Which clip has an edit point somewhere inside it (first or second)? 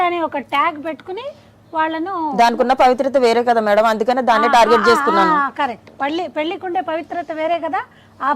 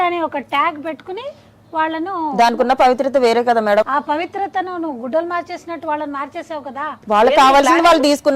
second